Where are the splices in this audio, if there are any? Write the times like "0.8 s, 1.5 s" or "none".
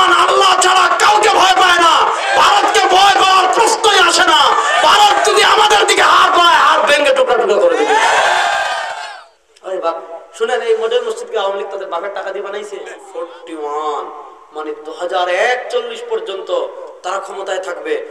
8.9 s, 13.0 s